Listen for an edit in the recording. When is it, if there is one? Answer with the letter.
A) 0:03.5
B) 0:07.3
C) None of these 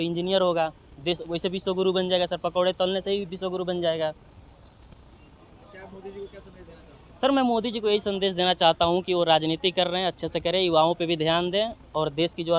C